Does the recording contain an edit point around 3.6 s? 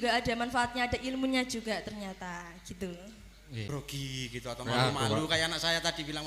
yes; 1 cut; at 3.6 s

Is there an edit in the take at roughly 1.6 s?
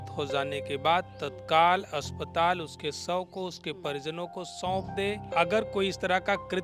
no; 1 cut; at 5.3 s

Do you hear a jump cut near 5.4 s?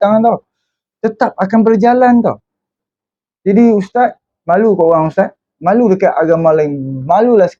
no; 1 cut; at 2.7 s

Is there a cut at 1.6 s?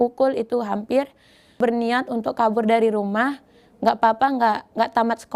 yes; 1 cut; at 1.6 s

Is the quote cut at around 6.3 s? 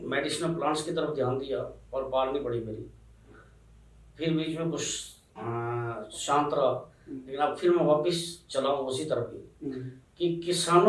no; 0 cuts

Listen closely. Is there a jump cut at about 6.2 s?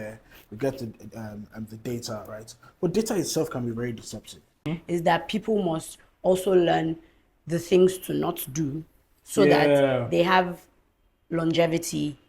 no; 1 cut; at 4.6 s

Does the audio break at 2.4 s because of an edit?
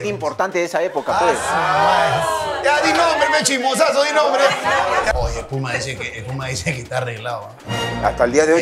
no; 1 cut; at 5.1 s

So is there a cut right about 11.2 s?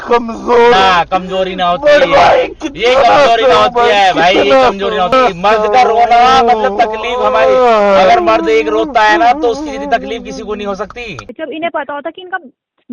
yes; 2 cuts; at 5.1 s, 11.2 s

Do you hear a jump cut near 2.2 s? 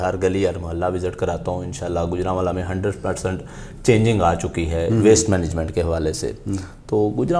no; 0 cuts

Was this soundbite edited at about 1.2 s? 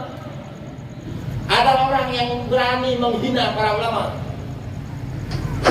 yes; 1 cut; at 1.2 s

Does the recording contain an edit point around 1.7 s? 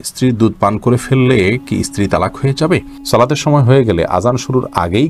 no; 1 cut; at 2.9 s

